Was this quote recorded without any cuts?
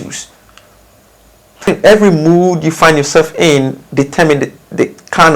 no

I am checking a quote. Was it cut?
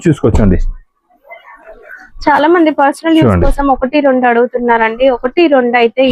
no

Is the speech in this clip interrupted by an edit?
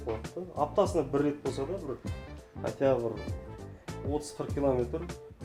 no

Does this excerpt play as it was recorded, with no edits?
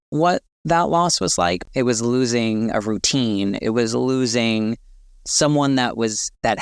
no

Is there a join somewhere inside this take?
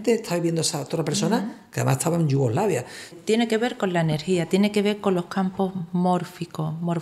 yes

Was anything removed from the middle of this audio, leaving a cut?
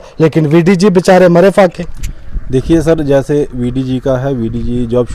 no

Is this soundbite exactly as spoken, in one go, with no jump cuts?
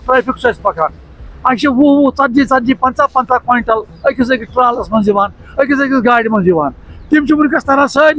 yes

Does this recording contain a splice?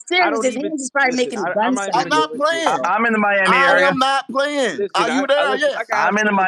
no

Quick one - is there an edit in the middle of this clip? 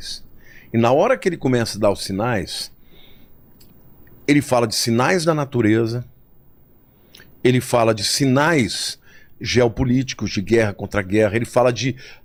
no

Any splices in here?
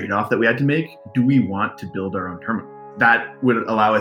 yes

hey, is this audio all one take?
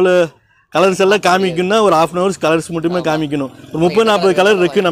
yes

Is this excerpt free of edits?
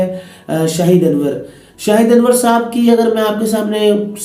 yes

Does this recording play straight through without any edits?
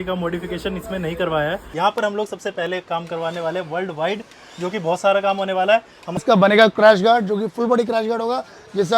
no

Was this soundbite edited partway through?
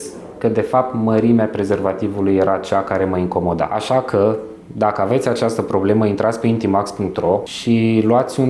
no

